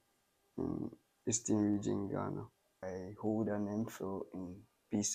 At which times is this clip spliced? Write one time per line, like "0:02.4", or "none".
0:02.8